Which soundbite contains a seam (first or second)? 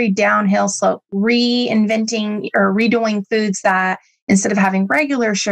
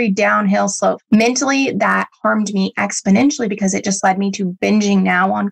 second